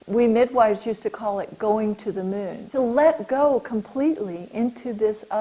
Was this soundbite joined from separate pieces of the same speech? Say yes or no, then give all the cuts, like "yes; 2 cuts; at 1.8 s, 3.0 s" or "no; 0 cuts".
yes; 1 cut; at 2.6 s